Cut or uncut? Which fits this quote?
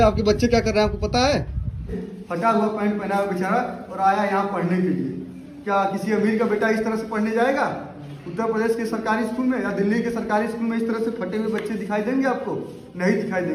cut